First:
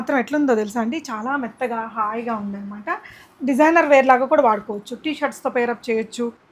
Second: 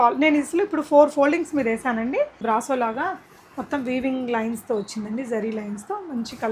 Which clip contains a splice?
second; 1 cut; at 2.4 s

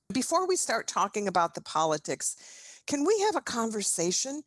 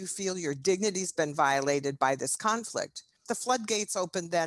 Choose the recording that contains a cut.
second; 1 cut; at 3.2 s

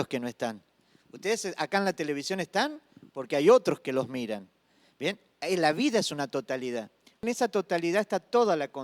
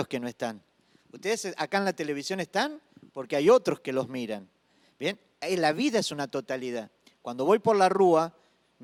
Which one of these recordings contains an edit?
first; 1 cut; at 7.2 s

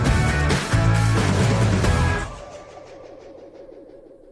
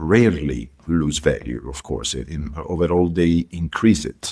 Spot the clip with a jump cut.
first; 1 cut; at 1.1 s

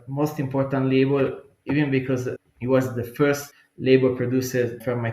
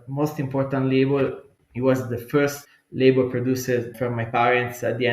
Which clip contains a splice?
second; 1 cut; at 1.5 s

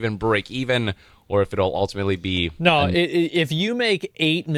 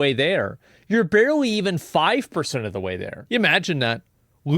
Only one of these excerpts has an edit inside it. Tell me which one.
second; 1 cut; at 3.2 s

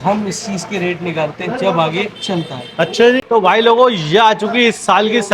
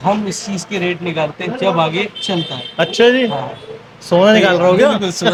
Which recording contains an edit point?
first; 1 cut; at 3.2 s

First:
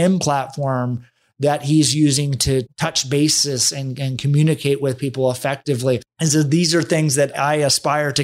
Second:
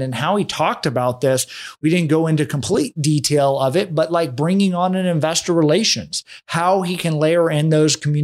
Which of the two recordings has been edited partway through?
first; 1 cut; at 2.7 s

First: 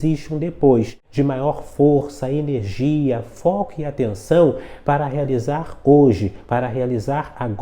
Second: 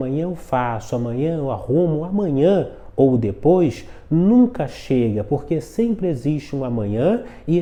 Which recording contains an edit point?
first; 1 cut; at 1.0 s

